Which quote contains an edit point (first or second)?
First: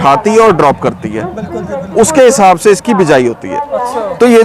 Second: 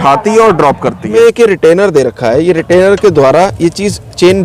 second